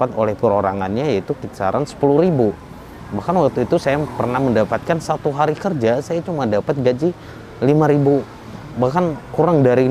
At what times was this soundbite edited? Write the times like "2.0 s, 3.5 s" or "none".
8.5 s